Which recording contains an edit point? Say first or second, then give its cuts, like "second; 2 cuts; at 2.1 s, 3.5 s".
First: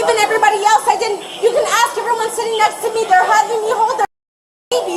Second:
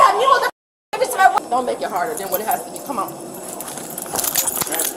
second; 1 cut; at 1.4 s